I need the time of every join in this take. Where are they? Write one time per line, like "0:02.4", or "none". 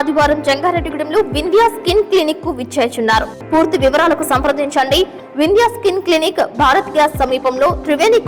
0:03.4